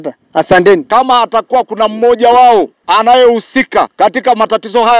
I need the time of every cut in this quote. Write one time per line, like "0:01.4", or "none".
0:00.8
0:02.8
0:03.9